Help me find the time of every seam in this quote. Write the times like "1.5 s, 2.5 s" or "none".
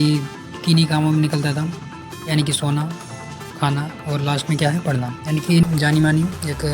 5.6 s